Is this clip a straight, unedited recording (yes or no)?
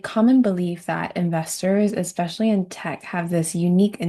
yes